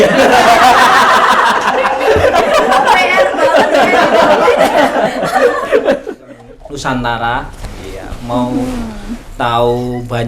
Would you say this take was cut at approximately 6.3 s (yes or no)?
yes